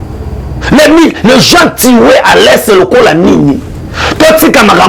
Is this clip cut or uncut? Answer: uncut